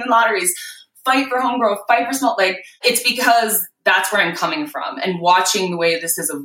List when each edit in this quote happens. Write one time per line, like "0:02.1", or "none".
0:02.7